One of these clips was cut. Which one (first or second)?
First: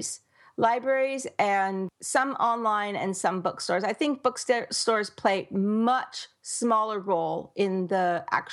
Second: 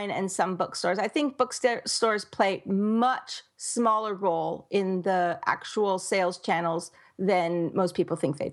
first